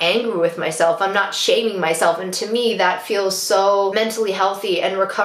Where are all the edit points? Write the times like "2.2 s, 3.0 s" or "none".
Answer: none